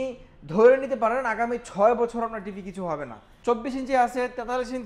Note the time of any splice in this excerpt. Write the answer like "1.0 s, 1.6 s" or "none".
3.3 s